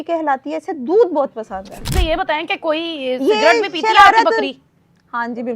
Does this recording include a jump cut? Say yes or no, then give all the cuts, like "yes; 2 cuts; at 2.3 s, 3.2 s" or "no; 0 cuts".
yes; 1 cut; at 1.9 s